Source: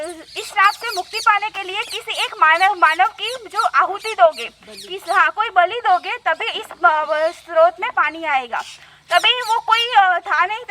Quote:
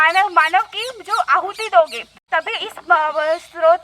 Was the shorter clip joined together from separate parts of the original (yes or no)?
yes